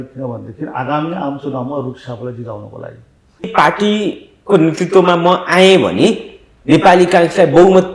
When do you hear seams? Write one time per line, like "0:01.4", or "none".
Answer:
0:03.5

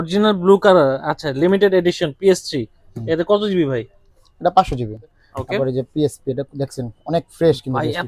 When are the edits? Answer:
0:05.1

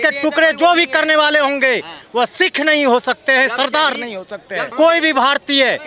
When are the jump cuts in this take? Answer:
0:04.7

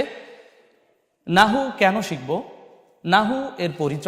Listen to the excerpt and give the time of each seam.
none

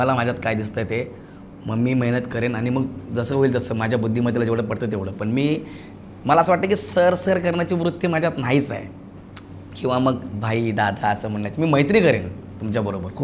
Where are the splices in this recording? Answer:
none

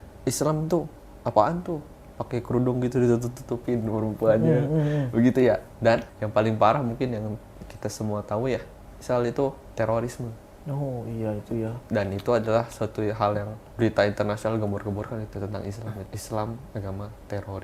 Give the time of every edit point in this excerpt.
0:06.2
0:09.6
0:13.6
0:16.1

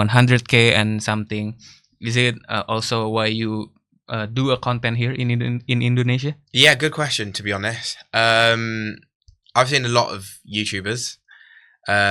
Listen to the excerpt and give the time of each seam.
none

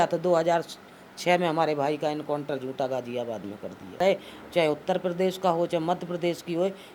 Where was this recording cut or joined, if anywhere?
0:03.8

